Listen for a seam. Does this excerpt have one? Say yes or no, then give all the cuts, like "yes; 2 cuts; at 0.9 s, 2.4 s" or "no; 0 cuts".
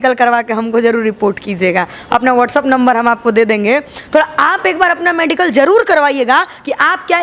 no; 0 cuts